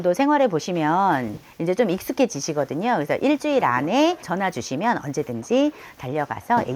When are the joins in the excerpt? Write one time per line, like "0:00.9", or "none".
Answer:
0:04.3